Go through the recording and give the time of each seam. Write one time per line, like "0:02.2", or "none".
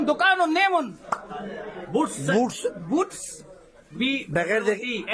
none